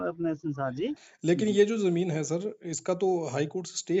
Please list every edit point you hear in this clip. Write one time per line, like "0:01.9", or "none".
0:01.1